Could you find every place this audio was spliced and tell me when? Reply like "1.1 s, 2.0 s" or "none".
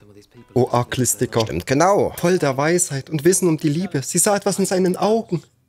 2.2 s